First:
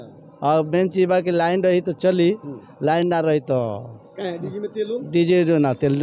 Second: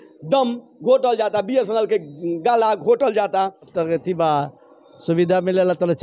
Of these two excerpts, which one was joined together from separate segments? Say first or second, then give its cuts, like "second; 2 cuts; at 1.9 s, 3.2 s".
second; 1 cut; at 3.7 s